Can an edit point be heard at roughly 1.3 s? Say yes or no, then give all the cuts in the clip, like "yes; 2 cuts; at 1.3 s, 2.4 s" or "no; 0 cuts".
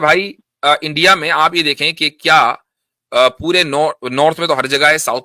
no; 0 cuts